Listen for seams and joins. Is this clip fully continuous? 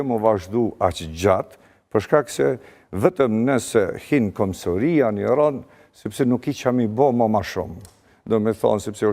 yes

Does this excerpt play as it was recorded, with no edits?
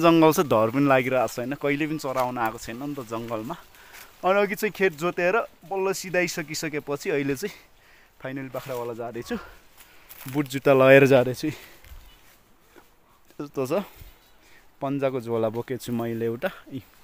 yes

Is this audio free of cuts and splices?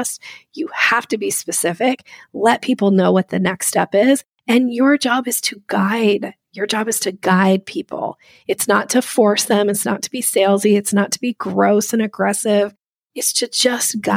yes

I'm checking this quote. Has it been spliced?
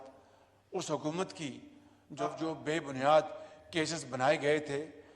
yes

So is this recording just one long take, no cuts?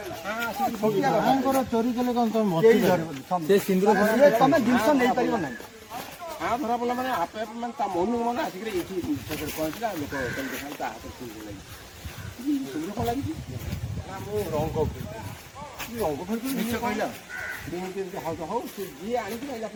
yes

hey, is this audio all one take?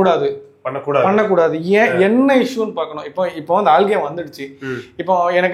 yes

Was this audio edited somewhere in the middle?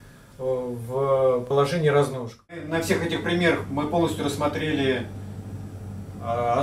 yes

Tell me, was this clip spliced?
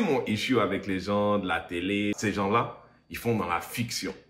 yes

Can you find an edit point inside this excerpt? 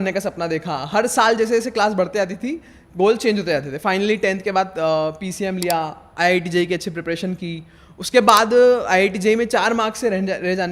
no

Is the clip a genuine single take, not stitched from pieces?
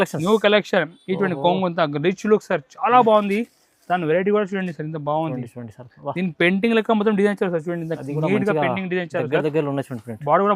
yes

